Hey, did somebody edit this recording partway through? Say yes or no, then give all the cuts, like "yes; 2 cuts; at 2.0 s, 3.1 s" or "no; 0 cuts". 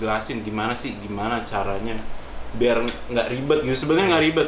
no; 0 cuts